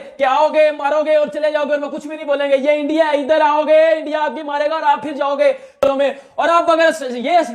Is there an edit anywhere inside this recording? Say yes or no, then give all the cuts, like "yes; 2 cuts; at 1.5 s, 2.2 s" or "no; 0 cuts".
no; 0 cuts